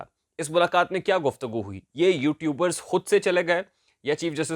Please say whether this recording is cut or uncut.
uncut